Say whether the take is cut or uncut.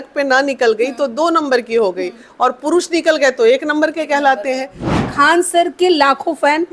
cut